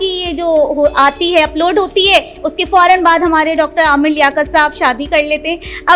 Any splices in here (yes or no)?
no